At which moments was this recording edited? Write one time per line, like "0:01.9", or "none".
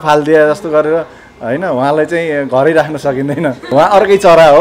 0:03.7